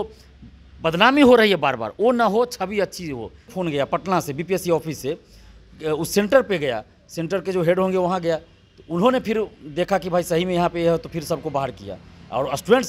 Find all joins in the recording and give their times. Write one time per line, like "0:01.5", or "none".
0:03.5